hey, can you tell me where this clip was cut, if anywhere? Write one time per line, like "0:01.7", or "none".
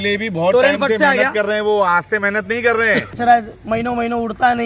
0:03.2